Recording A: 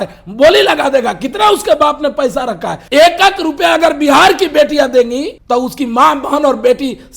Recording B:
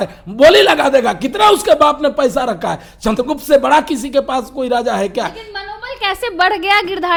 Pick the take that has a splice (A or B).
A